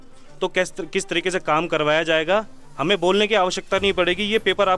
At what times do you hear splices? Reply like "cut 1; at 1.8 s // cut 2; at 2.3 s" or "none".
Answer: none